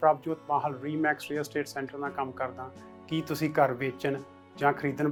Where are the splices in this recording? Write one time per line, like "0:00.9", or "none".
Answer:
none